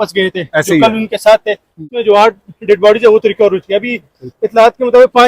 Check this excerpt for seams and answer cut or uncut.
cut